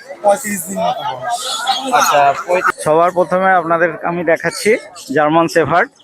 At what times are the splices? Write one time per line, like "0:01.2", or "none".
0:02.7